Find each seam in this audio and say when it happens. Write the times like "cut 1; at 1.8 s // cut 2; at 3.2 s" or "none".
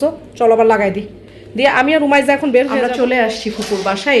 cut 1; at 2.8 s